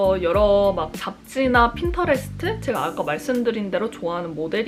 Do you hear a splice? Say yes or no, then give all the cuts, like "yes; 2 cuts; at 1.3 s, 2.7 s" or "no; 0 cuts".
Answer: no; 0 cuts